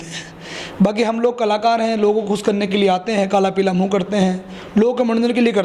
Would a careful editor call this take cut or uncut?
uncut